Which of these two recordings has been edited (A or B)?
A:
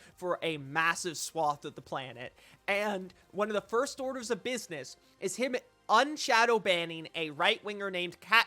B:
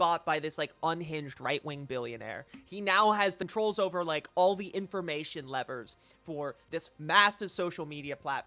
B